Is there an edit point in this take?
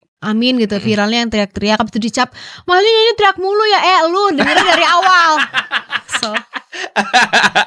no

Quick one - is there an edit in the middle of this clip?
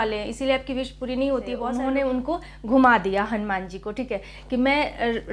yes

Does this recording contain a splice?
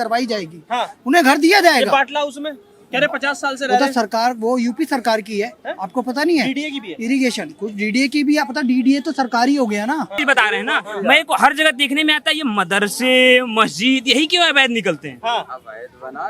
yes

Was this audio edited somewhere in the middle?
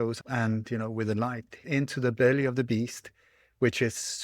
yes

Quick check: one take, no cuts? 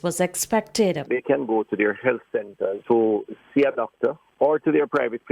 no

